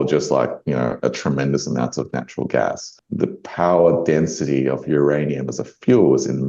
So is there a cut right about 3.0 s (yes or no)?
yes